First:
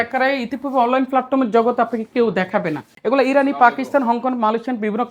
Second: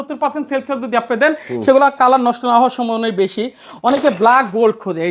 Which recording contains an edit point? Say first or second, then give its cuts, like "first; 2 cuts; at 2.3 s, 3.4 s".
first; 1 cut; at 2.9 s